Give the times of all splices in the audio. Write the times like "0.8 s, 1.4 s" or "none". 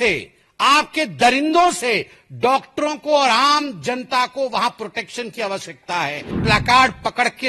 6.4 s